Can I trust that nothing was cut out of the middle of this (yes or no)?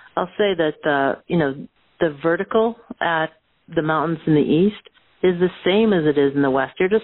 yes